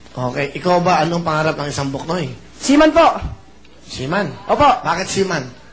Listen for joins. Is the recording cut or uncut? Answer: uncut